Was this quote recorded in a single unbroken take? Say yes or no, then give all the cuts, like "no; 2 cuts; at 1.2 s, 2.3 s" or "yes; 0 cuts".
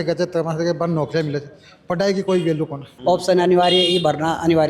no; 1 cut; at 2.9 s